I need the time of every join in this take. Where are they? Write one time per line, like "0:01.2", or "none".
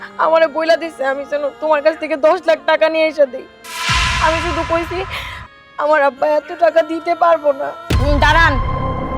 0:07.8